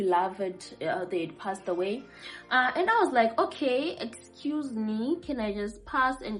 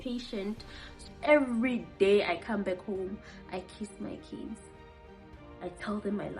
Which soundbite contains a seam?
second; 1 cut; at 1.1 s

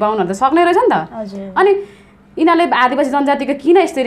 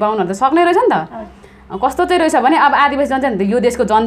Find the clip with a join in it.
second; 1 cut; at 1.4 s

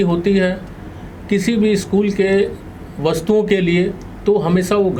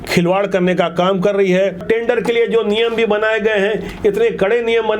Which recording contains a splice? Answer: second; 1 cut; at 1.8 s

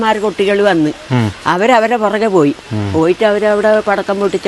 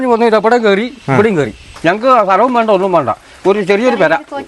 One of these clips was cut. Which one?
second; 1 cut; at 1.6 s

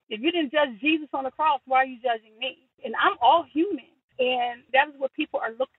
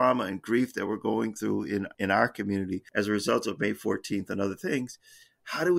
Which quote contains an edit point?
first; 1 cut; at 4.0 s

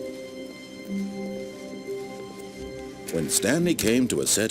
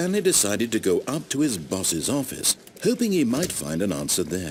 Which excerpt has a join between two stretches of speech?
first; 1 cut; at 3.1 s

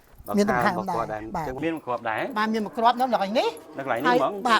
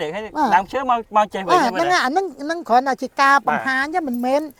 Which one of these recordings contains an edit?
first; 1 cut; at 1.6 s

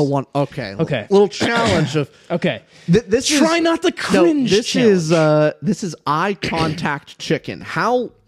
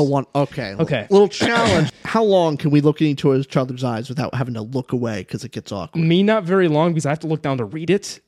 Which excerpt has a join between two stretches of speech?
second; 1 cut; at 1.9 s

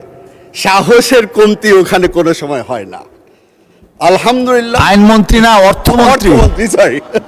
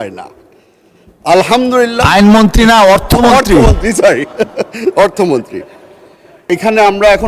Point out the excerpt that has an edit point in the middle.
second; 1 cut; at 6.4 s

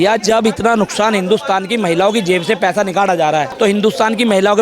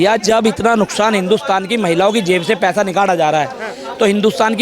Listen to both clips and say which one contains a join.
first; 1 cut; at 3.5 s

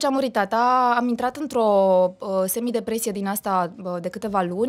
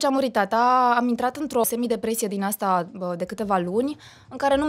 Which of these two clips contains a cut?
second; 1 cut; at 1.6 s

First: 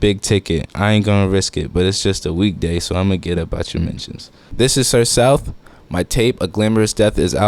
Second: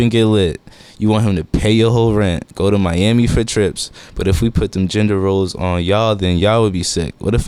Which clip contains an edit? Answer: first; 1 cut; at 4.4 s

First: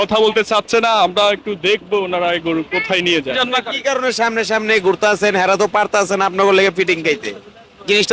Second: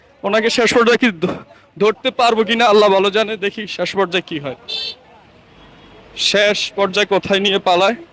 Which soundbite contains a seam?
first; 1 cut; at 3.4 s

